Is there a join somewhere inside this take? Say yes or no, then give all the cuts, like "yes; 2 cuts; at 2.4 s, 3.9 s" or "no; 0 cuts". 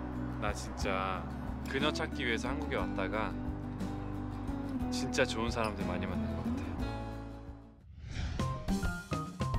yes; 1 cut; at 7.5 s